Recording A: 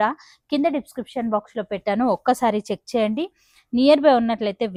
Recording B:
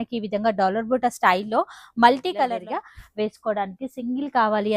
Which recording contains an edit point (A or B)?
B